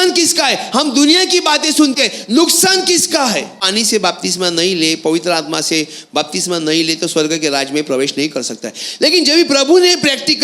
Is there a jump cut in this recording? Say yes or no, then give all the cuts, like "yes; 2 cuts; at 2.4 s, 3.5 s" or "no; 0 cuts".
yes; 1 cut; at 3.6 s